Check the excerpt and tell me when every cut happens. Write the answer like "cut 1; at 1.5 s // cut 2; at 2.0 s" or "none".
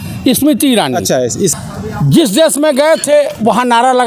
cut 1; at 1.5 s